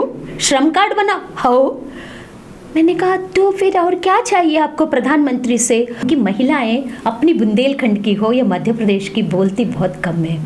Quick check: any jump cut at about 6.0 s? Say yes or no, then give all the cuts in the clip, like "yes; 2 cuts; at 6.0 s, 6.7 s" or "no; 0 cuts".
yes; 1 cut; at 6.0 s